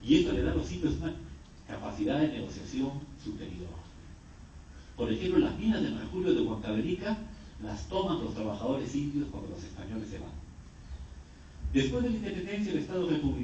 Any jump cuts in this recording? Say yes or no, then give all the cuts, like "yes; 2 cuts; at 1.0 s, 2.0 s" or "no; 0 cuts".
no; 0 cuts